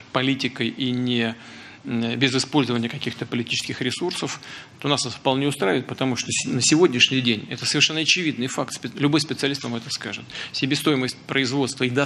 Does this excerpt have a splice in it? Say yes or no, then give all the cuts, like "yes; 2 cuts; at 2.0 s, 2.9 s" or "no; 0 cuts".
yes; 1 cut; at 8.9 s